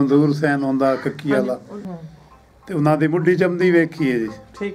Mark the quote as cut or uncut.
cut